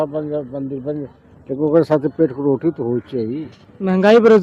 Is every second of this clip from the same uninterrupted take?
yes; 0 cuts

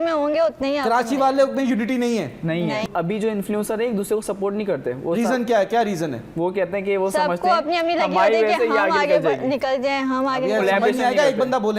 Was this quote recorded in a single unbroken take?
no; 1 cut; at 2.8 s

